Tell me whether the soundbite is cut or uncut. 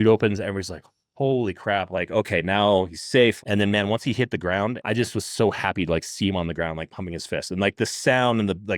cut